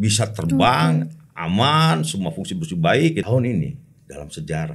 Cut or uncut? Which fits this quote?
cut